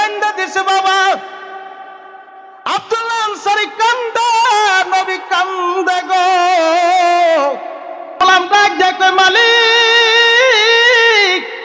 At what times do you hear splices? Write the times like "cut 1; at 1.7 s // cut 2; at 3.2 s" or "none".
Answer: cut 1; at 8.2 s